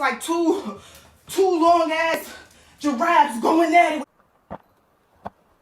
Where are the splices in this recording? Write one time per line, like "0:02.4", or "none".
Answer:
0:04.0